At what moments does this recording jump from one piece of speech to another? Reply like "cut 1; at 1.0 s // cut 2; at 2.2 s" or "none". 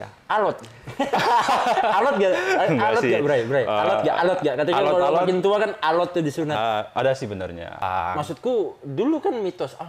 cut 1; at 7.8 s